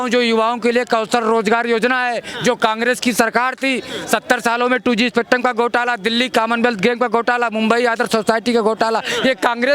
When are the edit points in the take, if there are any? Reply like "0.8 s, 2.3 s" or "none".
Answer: none

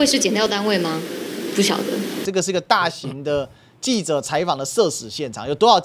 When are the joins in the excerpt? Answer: 2.2 s

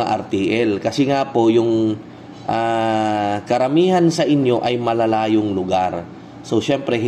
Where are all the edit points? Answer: none

